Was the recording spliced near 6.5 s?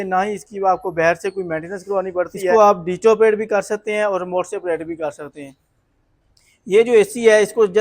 no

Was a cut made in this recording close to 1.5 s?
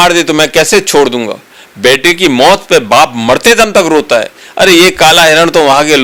no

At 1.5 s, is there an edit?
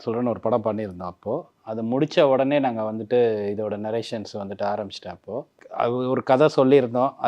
no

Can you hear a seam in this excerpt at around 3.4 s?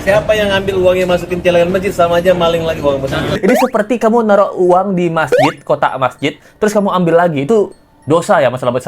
yes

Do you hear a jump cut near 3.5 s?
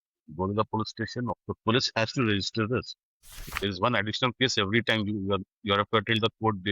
yes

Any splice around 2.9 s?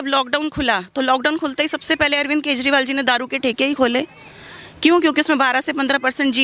no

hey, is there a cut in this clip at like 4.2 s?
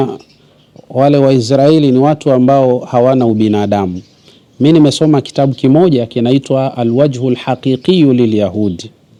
no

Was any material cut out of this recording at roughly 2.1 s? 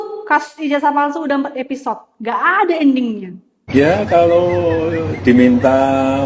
no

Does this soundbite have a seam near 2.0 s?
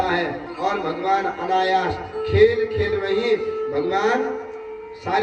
no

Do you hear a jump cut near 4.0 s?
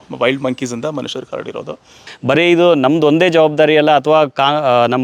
no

